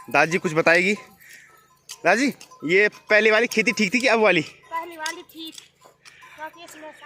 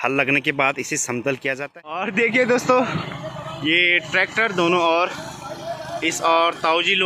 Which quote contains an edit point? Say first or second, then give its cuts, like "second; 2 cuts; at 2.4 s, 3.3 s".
second; 1 cut; at 2.0 s